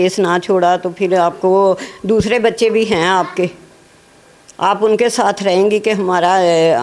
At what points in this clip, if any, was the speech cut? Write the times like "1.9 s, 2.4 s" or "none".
none